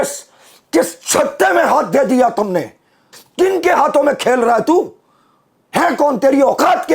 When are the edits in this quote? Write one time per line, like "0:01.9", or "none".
0:03.2